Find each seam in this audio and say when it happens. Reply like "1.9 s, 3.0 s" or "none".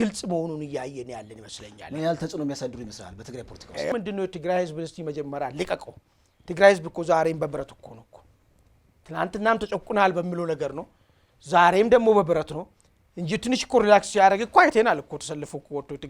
3.9 s